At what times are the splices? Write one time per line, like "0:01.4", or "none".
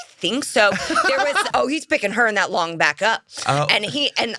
0:01.5